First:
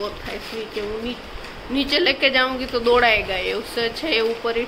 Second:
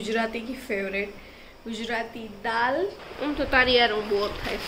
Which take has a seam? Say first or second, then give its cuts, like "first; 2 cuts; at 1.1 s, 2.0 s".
second; 1 cut; at 3.0 s